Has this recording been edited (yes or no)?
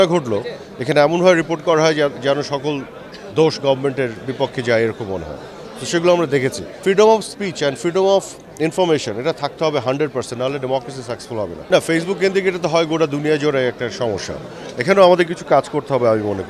yes